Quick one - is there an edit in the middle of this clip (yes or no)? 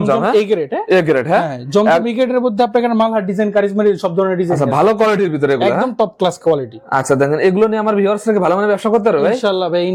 no